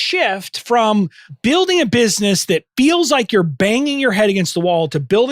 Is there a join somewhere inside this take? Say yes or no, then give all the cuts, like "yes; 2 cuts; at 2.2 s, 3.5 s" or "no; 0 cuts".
yes; 1 cut; at 1.2 s